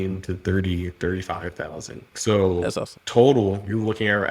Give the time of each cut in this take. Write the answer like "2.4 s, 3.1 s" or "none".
2.1 s, 2.9 s